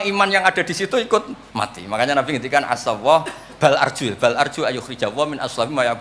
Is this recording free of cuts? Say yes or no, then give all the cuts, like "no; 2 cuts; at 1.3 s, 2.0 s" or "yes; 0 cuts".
no; 1 cut; at 1.4 s